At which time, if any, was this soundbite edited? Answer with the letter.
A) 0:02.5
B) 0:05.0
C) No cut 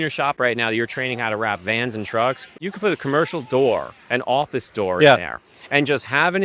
A